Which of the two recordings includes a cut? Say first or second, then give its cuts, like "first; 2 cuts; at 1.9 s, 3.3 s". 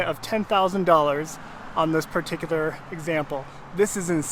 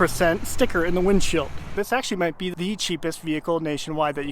second; 2 cuts; at 1.6 s, 2.5 s